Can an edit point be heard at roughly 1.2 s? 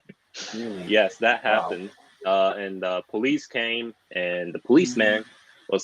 no; 1 cut; at 4.1 s

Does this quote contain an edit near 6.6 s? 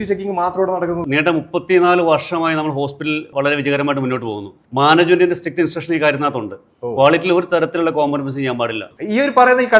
no; 4 cuts; at 1.0 s, 3.3 s, 4.6 s, 8.9 s

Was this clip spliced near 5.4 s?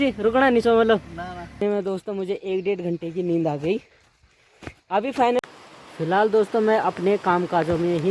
yes; 2 cuts; at 1.6 s, 5.4 s

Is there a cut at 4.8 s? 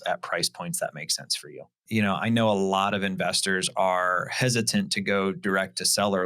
no; 1 cut; at 1.8 s

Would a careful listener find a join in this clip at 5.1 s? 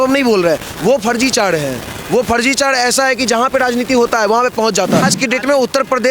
yes; 1 cut; at 5.1 s

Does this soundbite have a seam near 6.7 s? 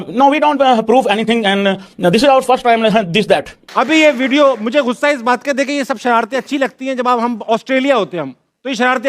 no; 1 cut; at 3.6 s

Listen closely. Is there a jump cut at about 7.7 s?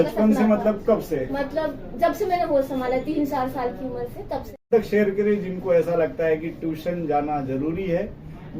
no; 1 cut; at 4.6 s

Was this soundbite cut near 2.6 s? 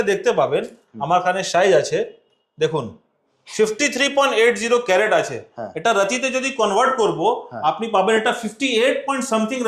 no; 0 cuts

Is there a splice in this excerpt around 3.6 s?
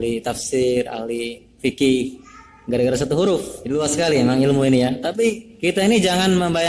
yes; 2 cuts; at 3.6 s, 5.5 s

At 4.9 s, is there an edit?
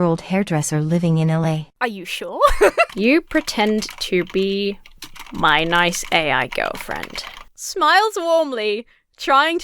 no; 2 cuts; at 1.7 s, 2.9 s

